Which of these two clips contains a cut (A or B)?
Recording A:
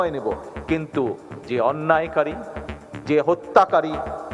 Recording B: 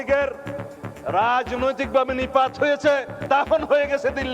B